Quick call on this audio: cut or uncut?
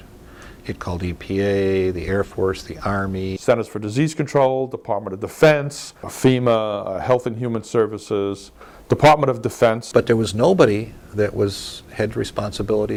uncut